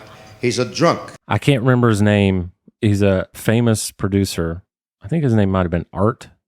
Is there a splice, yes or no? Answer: yes